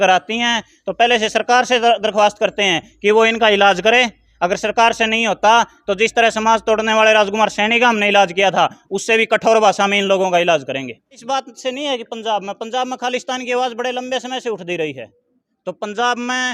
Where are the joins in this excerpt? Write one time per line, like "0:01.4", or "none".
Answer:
0:11.2